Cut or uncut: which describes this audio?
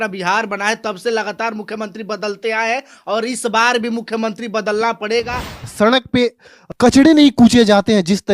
cut